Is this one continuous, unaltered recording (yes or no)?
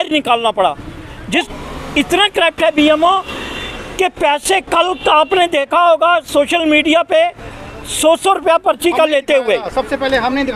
no